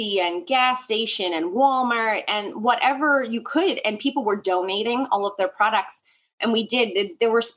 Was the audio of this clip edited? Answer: no; 0 cuts

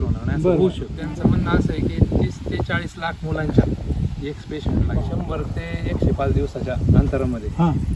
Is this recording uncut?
no; 2 cuts; at 0.9 s, 5.1 s

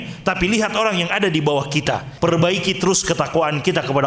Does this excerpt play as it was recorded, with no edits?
no; 1 cut; at 2.1 s

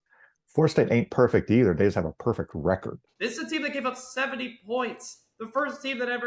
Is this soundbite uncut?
no; 1 cut; at 3.0 s

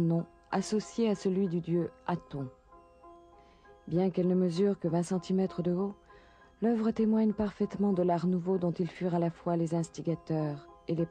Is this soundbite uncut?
no; 1 cut; at 8.9 s

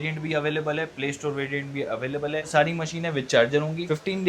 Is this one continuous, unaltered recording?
no; 1 cut; at 2.5 s

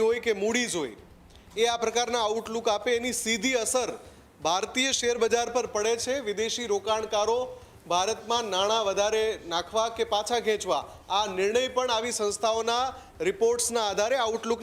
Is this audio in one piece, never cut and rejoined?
yes; 0 cuts

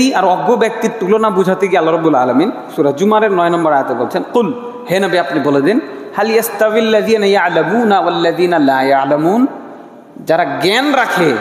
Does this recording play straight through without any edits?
yes; 0 cuts

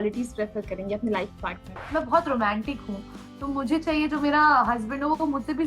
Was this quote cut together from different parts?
yes; 1 cut; at 1.7 s

